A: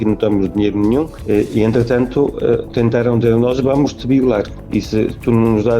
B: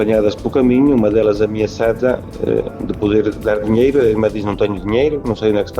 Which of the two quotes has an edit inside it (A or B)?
A